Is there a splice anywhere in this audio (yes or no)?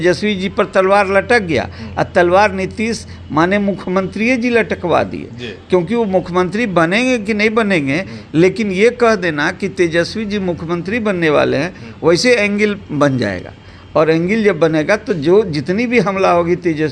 no